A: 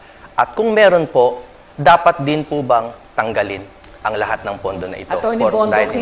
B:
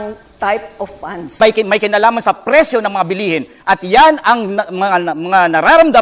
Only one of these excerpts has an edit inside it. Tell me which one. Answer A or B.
B